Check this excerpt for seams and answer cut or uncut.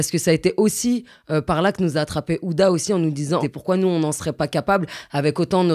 cut